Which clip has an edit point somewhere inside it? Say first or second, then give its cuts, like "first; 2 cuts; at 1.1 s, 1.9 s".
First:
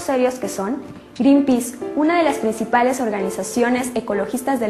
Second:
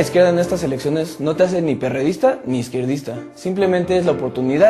first; 1 cut; at 2.9 s